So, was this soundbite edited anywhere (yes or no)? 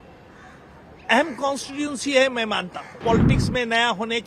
yes